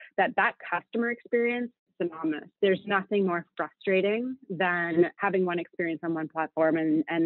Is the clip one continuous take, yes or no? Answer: no